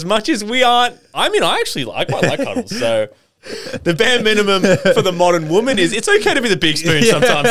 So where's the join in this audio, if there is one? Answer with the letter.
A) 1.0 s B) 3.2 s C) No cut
B